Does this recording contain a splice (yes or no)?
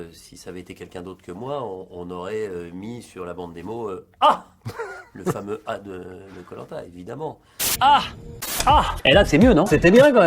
no